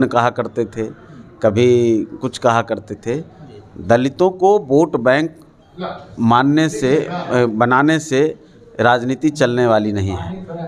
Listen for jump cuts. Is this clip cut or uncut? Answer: uncut